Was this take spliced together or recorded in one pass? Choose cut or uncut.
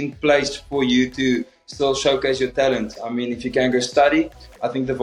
uncut